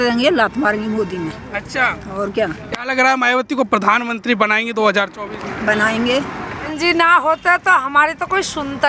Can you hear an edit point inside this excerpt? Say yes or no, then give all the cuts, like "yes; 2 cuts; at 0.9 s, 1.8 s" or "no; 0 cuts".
yes; 1 cut; at 6.7 s